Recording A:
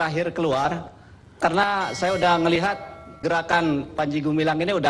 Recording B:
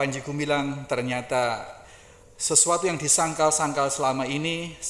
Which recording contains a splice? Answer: A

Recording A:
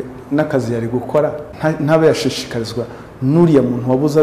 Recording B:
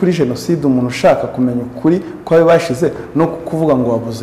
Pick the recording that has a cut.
A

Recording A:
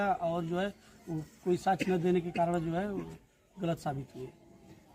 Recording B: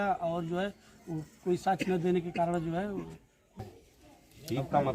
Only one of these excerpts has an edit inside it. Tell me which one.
B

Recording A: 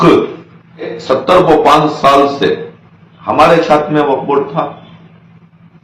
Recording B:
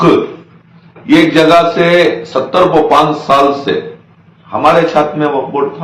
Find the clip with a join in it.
A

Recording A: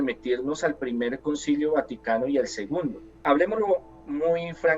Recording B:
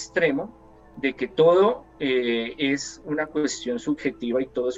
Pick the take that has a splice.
A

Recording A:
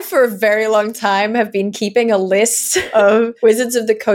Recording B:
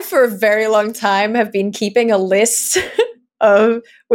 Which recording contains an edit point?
A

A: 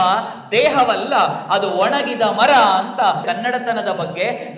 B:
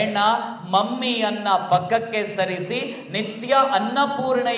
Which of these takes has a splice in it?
A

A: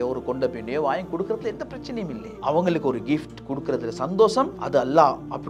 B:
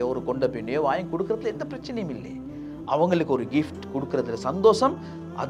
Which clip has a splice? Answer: A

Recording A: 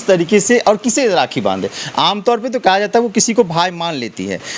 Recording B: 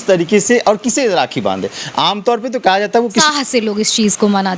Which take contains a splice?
B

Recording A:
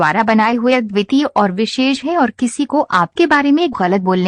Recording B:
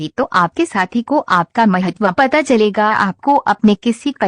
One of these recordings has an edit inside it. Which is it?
B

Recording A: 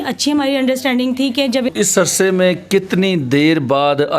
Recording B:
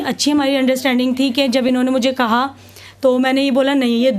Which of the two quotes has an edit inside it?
A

